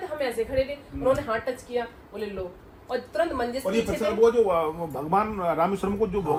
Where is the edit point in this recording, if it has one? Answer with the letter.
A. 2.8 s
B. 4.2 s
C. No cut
C